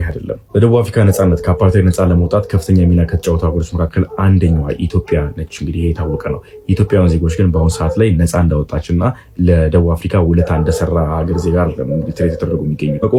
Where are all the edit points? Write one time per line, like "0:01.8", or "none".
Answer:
none